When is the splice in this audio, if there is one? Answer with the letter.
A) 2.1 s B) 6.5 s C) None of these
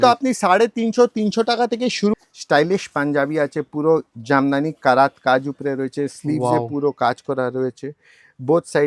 A